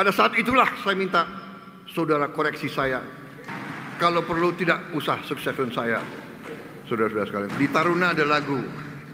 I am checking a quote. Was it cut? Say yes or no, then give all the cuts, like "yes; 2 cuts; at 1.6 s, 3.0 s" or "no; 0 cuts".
yes; 2 cuts; at 3.4 s, 7.5 s